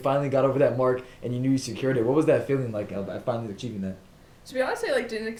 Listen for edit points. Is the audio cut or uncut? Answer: uncut